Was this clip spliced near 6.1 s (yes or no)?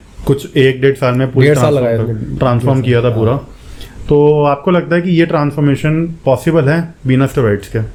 no